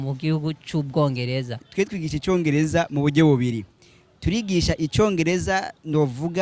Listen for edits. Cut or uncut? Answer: cut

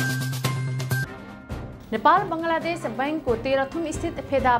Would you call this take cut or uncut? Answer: cut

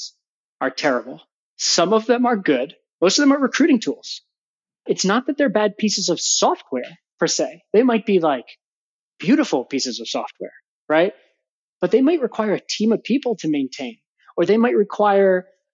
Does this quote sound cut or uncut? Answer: cut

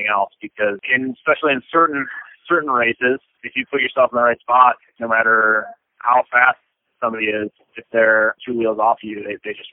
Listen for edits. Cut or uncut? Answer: uncut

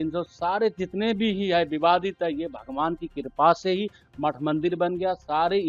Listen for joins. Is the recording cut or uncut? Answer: uncut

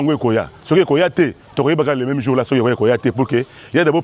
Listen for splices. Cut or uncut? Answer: uncut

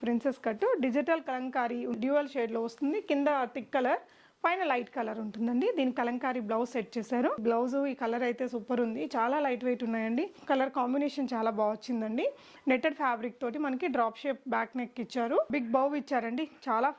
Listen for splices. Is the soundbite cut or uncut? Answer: cut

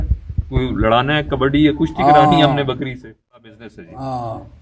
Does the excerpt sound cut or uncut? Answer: cut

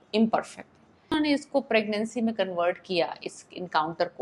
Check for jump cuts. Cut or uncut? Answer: cut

